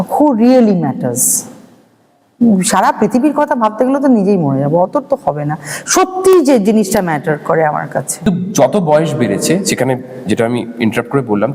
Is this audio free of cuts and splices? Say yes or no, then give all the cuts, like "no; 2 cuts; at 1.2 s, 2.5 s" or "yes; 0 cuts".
no; 1 cut; at 8.3 s